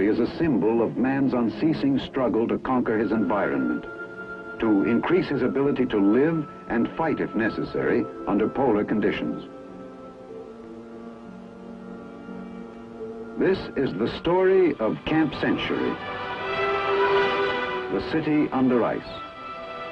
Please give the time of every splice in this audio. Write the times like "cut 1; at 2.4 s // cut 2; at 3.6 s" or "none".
none